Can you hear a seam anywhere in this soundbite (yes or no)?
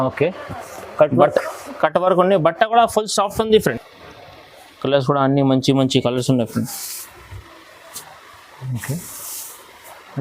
yes